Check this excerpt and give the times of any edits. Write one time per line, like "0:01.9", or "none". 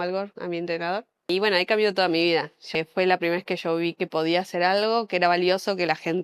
0:01.3
0:02.8